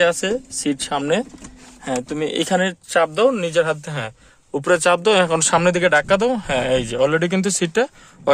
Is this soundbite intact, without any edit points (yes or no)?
yes